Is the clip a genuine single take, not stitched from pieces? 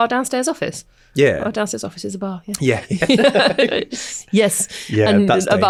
yes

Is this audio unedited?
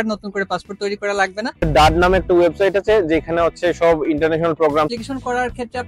no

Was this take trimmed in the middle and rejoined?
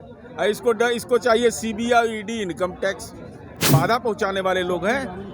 yes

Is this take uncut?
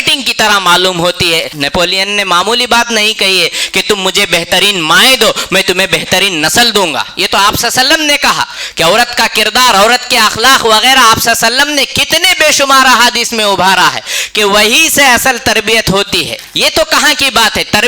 no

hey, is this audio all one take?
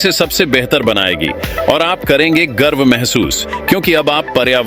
yes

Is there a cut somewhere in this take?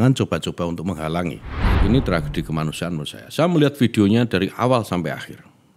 yes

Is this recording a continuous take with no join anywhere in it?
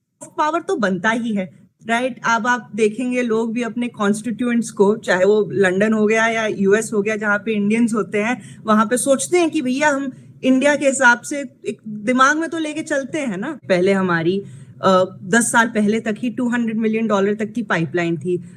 no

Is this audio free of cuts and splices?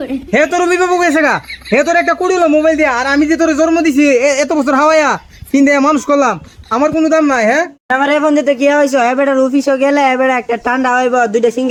yes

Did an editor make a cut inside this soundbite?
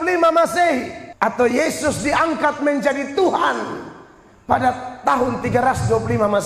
yes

